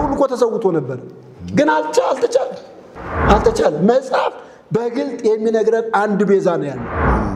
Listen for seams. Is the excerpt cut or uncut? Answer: uncut